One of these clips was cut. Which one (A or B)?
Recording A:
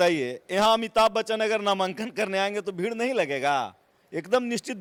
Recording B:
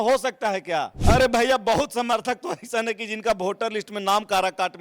B